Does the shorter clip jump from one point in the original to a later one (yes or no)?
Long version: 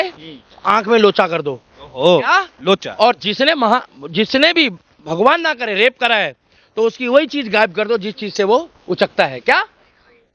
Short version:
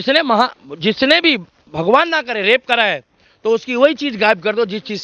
no